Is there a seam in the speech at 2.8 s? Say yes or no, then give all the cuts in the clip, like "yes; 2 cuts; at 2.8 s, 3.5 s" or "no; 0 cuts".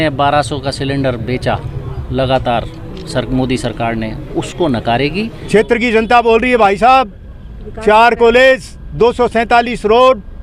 no; 1 cut; at 5.4 s